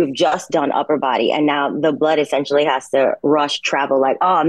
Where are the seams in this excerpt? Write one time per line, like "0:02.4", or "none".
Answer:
none

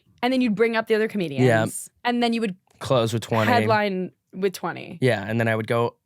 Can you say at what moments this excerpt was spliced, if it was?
0:01.9

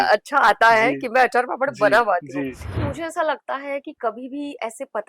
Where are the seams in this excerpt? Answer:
0:02.8

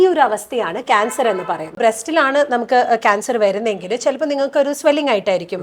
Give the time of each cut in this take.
0:01.8

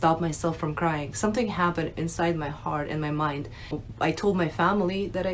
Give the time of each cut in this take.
0:03.9

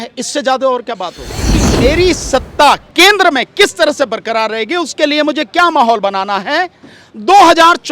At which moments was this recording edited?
0:01.6

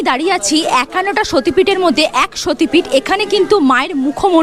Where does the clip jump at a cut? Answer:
none

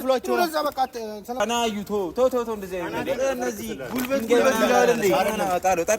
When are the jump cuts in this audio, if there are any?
0:01.4

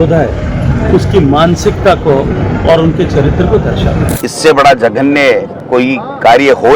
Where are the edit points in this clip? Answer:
0:04.1
0:05.6

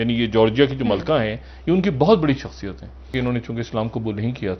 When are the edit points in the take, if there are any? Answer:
0:03.1

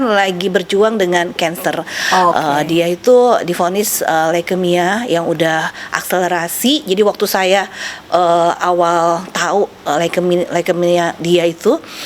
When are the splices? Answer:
none

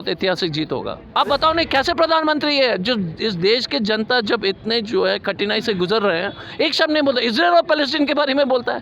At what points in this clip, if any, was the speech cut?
0:01.1

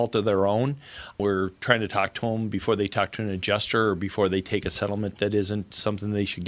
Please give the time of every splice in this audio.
none

